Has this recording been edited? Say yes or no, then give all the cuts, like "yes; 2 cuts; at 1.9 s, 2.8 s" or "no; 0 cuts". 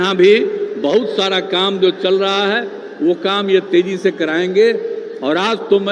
no; 0 cuts